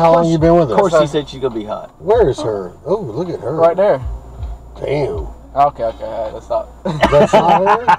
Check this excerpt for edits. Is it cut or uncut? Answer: cut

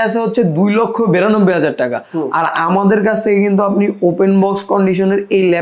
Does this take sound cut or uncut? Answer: uncut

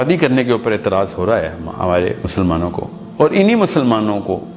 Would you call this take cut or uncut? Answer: uncut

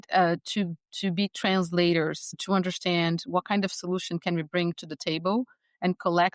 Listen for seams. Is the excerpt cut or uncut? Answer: cut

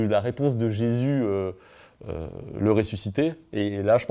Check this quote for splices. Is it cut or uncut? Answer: uncut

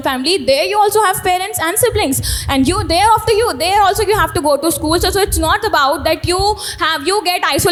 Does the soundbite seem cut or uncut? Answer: uncut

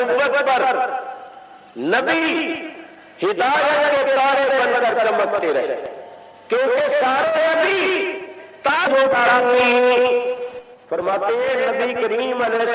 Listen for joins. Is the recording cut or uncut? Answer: cut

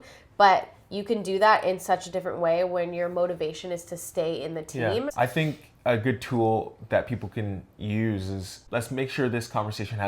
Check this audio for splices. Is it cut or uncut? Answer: cut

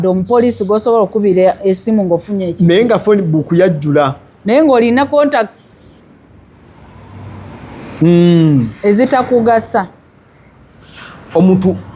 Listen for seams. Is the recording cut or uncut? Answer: uncut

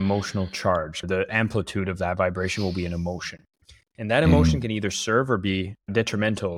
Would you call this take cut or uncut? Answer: cut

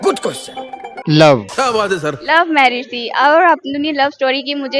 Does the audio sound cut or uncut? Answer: uncut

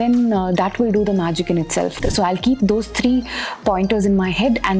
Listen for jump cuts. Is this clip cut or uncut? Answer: cut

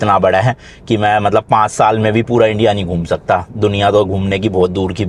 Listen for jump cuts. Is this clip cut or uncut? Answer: uncut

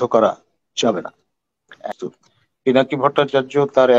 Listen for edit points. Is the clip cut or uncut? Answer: cut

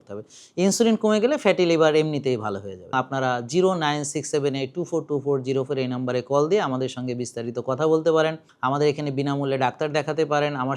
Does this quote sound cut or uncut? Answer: cut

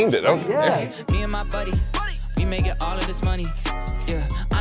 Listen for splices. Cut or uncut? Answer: cut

